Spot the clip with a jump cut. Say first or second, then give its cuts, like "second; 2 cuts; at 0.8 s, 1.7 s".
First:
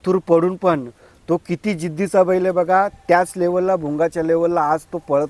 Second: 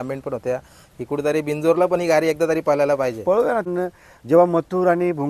second; 1 cut; at 3.7 s